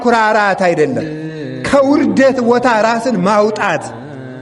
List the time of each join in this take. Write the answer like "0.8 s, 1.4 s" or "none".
none